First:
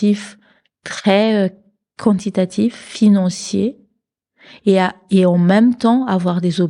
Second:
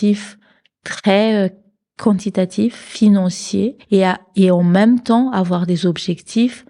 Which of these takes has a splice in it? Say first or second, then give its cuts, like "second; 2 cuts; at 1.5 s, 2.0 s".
second; 1 cut; at 3.8 s